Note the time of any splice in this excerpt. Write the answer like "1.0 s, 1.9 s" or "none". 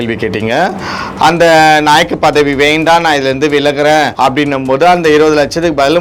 4.1 s